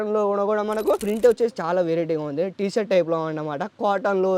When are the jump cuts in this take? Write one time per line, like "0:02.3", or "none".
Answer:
0:01.0